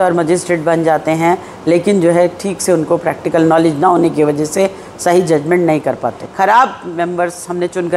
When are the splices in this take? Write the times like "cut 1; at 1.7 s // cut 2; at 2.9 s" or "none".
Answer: cut 1; at 6.2 s